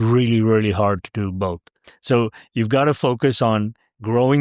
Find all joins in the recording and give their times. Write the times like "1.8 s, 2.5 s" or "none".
1.9 s